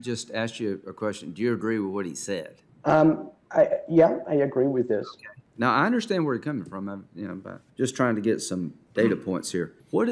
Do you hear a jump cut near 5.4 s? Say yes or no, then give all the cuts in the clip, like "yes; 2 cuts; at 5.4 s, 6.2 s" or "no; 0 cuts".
no; 0 cuts